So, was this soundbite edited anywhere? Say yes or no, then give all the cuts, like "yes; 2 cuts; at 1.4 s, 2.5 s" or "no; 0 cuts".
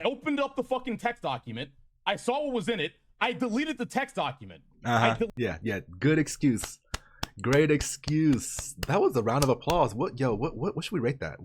no; 0 cuts